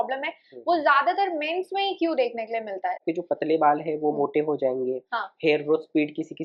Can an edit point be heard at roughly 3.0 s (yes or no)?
yes